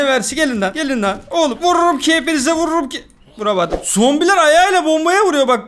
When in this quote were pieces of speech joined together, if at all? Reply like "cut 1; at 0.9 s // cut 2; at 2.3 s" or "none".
cut 1; at 3.8 s